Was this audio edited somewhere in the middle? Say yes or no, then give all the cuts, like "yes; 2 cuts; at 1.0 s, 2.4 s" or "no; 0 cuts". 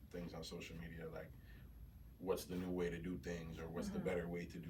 no; 0 cuts